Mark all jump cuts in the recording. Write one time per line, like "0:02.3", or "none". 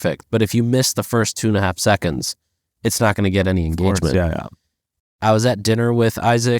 0:05.1